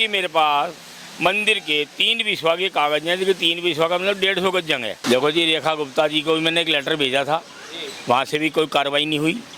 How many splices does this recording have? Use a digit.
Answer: 1